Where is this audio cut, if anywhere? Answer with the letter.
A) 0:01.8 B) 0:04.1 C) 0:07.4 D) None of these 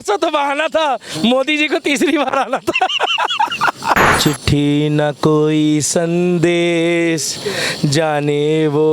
B